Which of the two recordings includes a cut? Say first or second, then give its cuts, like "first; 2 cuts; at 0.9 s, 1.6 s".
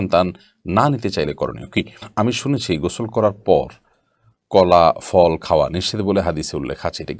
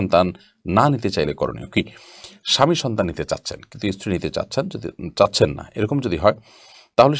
first; 1 cut; at 2.1 s